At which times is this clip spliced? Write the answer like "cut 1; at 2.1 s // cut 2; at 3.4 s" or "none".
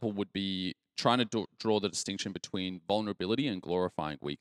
none